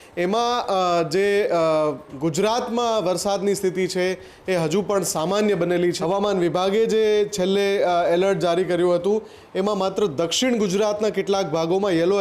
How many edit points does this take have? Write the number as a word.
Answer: one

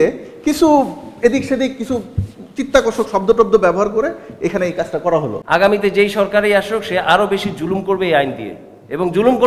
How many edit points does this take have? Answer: one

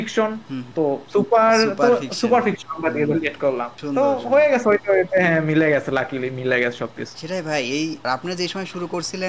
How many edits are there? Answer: zero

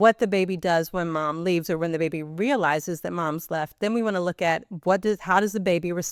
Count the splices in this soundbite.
zero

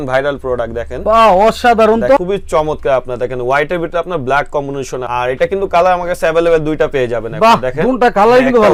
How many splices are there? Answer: zero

